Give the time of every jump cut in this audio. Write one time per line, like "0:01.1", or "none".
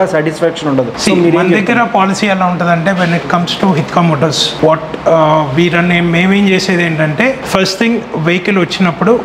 none